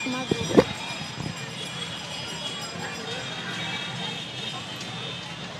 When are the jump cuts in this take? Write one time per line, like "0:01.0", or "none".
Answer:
none